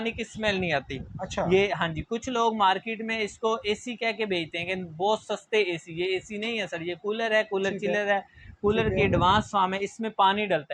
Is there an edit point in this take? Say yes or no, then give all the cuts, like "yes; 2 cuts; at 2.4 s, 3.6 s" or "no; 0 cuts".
no; 0 cuts